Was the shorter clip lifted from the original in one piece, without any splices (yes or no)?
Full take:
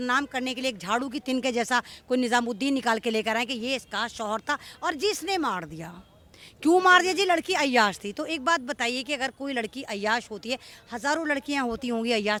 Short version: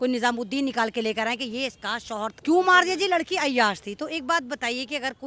no